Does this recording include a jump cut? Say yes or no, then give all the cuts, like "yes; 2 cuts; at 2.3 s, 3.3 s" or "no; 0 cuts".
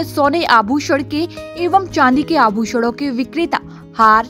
no; 0 cuts